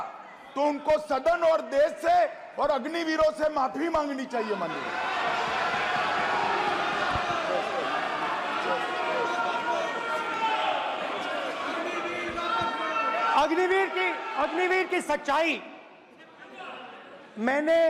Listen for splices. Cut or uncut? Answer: uncut